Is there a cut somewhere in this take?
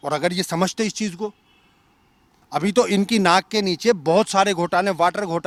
no; 0 cuts

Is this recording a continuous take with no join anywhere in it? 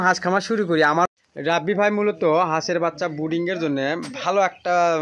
no; 1 cut; at 1.1 s

